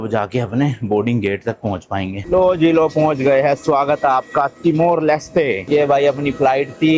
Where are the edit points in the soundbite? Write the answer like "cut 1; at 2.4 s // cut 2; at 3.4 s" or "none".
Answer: cut 1; at 2.2 s